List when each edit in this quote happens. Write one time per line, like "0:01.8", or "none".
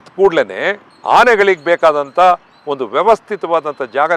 none